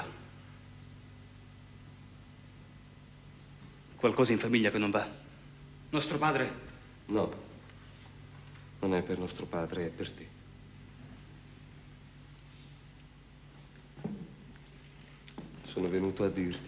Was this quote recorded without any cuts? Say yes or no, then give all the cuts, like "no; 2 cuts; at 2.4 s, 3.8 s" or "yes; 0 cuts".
no; 1 cut; at 14.4 s